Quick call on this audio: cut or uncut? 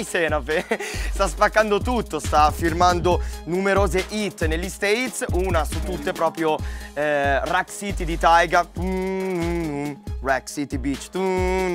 uncut